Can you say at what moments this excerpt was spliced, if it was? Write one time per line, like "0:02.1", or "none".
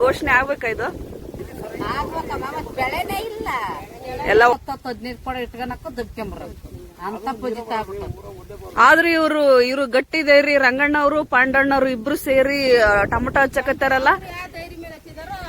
0:01.5
0:04.5